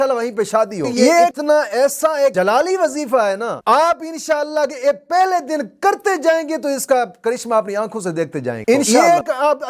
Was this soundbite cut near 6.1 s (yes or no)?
no